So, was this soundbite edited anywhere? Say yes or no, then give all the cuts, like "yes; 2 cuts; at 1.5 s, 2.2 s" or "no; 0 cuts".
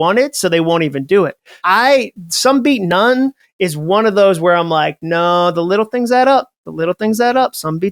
yes; 1 cut; at 1.6 s